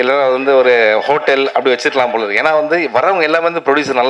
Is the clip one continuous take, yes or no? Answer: yes